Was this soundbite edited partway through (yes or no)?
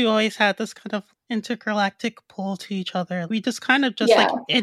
yes